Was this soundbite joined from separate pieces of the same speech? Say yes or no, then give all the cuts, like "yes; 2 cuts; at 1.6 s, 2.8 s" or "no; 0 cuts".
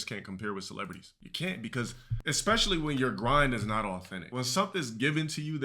yes; 2 cuts; at 2.1 s, 4.2 s